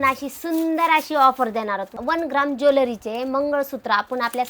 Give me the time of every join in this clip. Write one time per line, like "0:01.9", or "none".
0:02.0